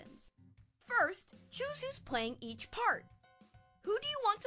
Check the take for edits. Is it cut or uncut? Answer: uncut